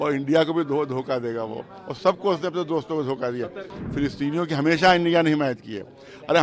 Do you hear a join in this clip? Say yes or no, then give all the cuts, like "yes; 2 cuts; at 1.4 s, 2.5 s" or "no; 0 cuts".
yes; 1 cut; at 3.8 s